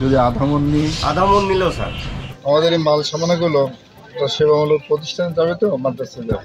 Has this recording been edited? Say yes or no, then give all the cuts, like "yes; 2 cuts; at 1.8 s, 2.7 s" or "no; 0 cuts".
yes; 1 cut; at 2.3 s